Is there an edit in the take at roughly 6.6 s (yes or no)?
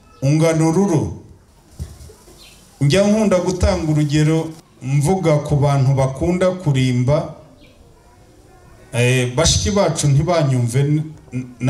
no